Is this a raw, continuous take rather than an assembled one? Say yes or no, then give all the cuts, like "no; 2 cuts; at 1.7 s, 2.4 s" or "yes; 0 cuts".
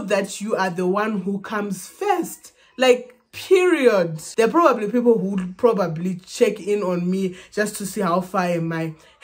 no; 1 cut; at 4.2 s